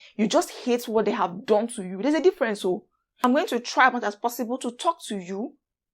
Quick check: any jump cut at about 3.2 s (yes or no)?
yes